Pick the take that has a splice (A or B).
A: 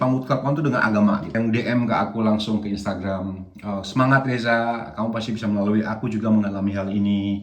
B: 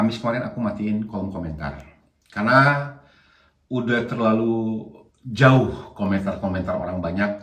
A